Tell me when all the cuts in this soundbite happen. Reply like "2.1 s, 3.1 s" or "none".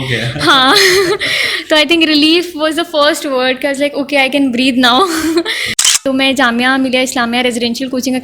5.9 s